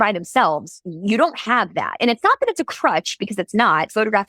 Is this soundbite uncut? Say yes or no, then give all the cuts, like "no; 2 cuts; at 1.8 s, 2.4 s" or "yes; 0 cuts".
yes; 0 cuts